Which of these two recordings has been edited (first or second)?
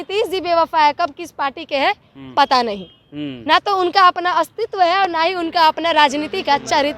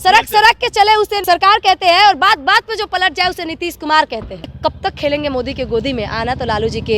second